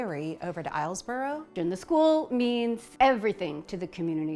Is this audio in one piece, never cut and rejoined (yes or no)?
no